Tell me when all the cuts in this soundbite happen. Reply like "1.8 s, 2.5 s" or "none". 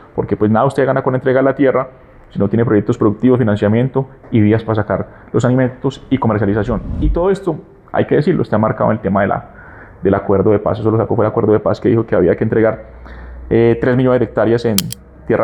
none

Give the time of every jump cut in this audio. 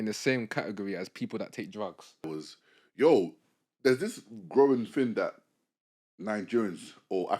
2.3 s

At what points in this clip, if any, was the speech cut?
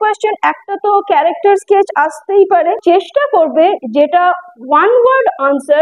2.8 s

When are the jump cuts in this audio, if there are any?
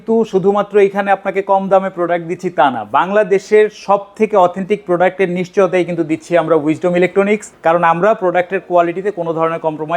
7.5 s

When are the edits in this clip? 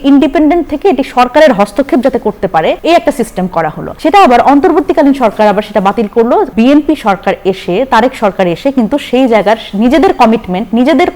2.8 s, 3.8 s, 6.5 s

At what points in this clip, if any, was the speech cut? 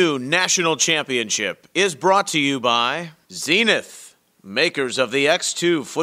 3.1 s

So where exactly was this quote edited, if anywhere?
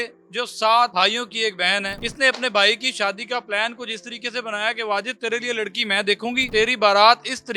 0.9 s, 2.0 s, 6.4 s

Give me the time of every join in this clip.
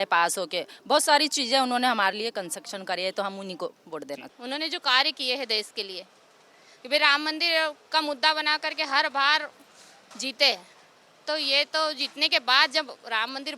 4.3 s

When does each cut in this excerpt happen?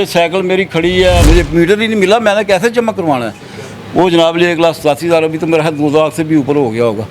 1.2 s

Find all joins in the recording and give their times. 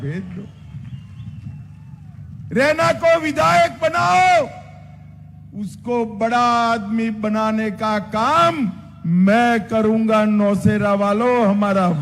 none

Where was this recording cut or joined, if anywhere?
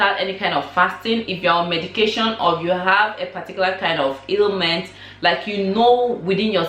none

